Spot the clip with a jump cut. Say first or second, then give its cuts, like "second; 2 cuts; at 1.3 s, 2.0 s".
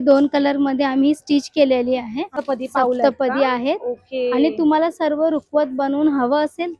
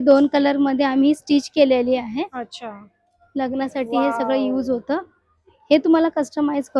first; 1 cut; at 2.3 s